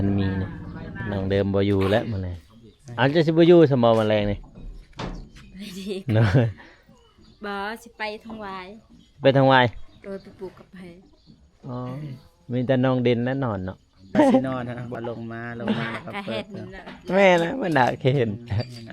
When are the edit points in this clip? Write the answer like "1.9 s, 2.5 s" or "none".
1.0 s, 14.2 s